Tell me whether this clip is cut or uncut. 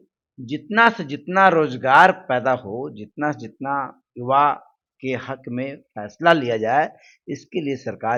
uncut